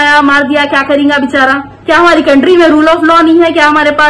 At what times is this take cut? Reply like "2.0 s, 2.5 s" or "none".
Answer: 1.7 s